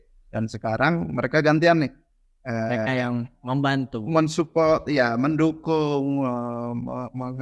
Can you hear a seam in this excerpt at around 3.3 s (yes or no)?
no